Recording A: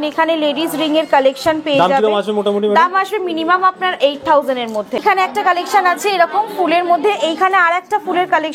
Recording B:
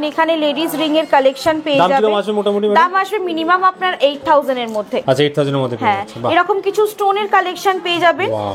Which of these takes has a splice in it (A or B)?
A